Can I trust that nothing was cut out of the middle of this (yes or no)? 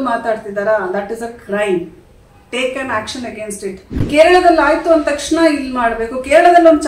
no